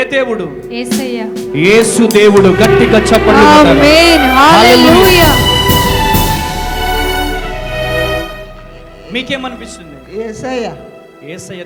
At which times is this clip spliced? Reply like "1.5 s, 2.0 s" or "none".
none